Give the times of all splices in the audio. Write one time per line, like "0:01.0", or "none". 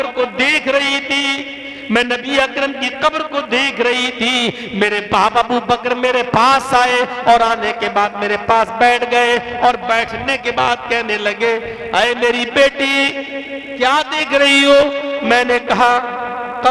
none